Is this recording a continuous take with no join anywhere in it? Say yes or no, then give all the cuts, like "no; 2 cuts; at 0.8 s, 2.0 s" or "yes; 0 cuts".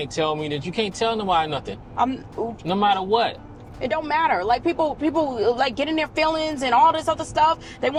yes; 0 cuts